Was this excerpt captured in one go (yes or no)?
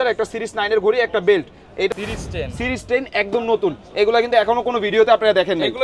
no